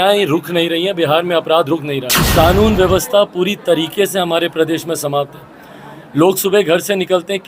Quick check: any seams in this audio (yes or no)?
yes